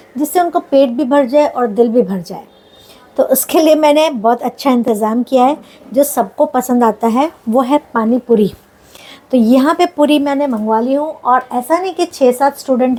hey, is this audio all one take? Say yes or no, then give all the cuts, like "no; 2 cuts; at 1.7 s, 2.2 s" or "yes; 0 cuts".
yes; 0 cuts